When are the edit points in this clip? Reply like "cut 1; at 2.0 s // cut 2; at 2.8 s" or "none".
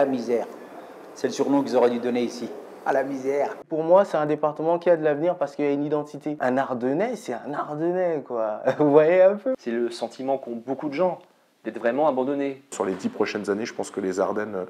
cut 1; at 3.6 s // cut 2; at 6.4 s // cut 3; at 9.6 s // cut 4; at 12.7 s